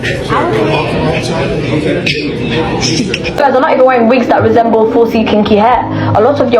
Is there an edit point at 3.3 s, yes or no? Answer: yes